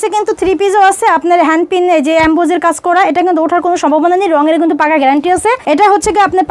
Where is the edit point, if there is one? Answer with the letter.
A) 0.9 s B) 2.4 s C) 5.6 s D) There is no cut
C